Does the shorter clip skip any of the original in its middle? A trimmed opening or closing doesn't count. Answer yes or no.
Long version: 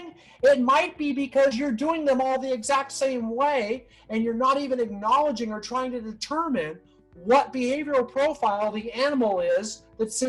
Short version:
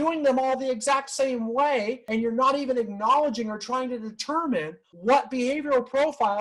yes